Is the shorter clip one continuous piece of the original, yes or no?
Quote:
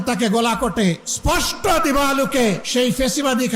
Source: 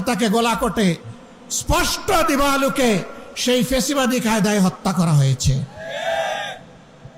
no